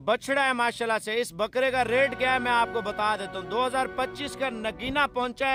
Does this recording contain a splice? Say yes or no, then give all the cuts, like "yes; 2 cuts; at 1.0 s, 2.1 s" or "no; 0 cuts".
no; 0 cuts